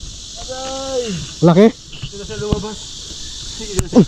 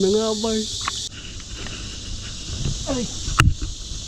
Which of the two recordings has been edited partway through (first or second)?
second